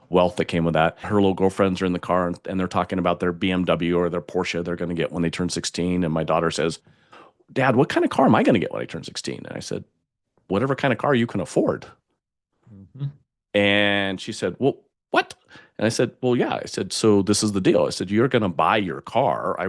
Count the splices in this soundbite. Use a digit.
1